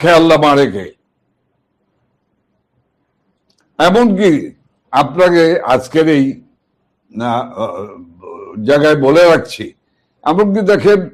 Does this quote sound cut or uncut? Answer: uncut